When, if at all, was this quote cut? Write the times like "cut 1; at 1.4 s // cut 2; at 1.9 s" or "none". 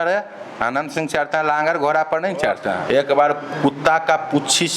cut 1; at 2.8 s